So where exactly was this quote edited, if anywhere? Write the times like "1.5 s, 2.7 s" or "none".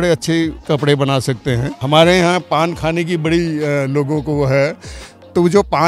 1.8 s